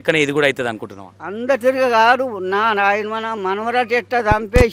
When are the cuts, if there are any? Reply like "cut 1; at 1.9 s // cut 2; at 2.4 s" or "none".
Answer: none